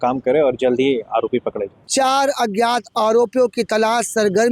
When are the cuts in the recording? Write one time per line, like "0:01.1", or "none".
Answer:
0:01.8